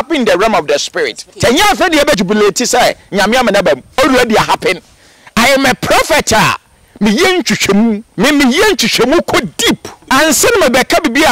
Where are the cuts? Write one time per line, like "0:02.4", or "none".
0:01.2
0:02.2
0:03.9
0:08.1
0:09.9